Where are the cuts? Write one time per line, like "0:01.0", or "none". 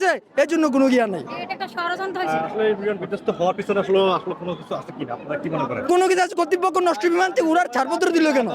0:05.9